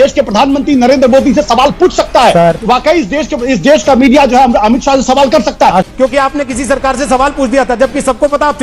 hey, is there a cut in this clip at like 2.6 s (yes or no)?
yes